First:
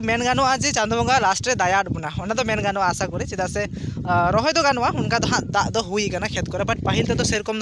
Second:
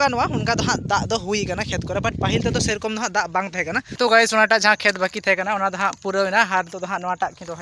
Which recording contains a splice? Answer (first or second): second